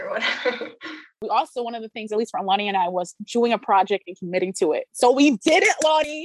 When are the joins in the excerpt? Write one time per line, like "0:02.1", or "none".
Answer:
0:01.2